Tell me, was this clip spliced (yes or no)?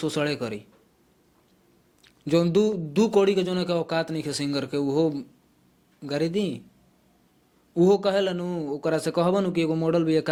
no